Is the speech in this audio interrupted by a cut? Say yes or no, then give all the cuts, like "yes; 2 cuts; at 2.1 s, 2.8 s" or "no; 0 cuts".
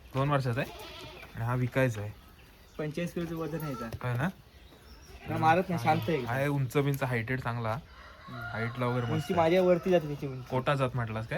no; 0 cuts